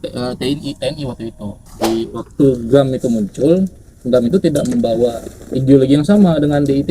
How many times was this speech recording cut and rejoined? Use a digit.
1